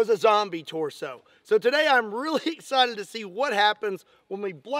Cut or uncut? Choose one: uncut